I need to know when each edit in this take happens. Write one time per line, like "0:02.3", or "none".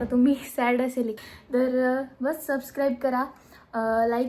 0:01.2